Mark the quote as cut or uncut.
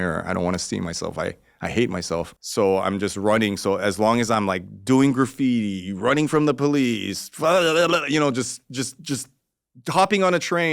cut